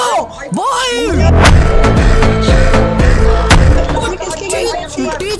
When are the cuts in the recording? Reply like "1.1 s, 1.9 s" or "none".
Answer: none